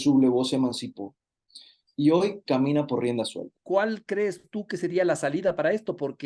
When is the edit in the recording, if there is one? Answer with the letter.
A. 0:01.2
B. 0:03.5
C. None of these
B